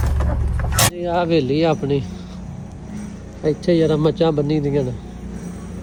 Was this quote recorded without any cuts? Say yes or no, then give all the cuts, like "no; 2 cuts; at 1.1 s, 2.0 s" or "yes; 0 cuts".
yes; 0 cuts